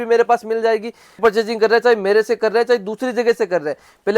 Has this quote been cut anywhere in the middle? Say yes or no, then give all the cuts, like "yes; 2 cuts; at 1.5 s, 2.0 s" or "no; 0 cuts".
yes; 1 cut; at 1.2 s